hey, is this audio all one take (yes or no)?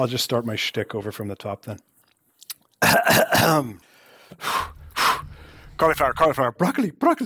yes